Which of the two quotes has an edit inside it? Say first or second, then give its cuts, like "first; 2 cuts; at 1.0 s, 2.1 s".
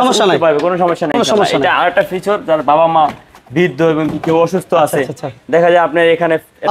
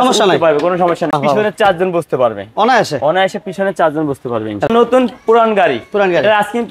second; 2 cuts; at 1.1 s, 4.7 s